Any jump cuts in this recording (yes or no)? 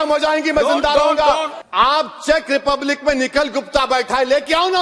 yes